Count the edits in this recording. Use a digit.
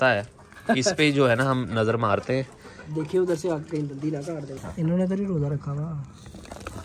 1